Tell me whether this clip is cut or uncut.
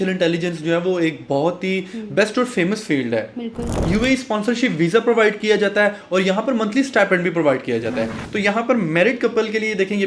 cut